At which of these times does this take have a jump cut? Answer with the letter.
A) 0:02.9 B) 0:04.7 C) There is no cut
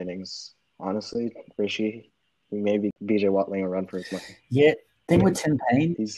A